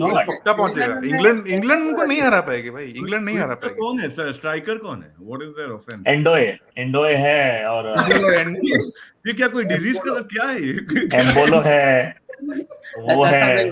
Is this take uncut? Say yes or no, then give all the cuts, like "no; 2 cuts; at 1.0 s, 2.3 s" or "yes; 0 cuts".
yes; 0 cuts